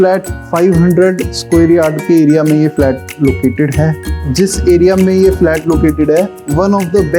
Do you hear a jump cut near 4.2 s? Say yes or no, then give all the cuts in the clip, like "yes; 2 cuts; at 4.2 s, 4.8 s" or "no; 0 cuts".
yes; 1 cut; at 4.2 s